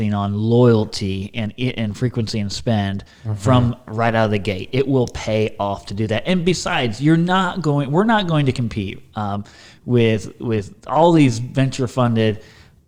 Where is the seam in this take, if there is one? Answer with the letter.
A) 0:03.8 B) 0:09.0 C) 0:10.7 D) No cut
D